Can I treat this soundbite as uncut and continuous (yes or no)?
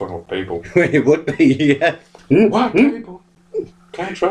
no